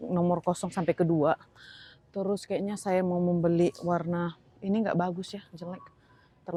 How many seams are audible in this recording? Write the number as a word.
zero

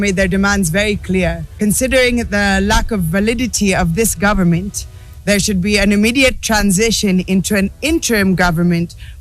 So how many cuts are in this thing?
one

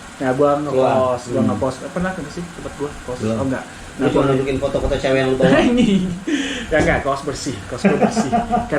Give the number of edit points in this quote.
zero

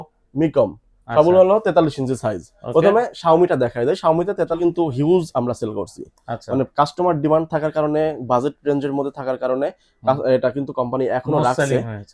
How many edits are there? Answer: one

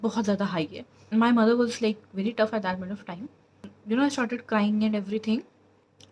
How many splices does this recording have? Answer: zero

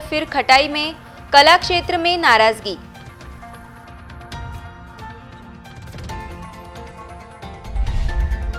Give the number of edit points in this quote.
zero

